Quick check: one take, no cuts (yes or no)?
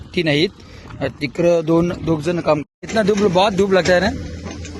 no